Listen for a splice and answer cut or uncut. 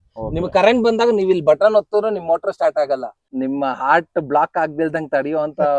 cut